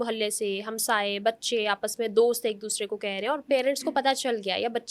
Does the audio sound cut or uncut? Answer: uncut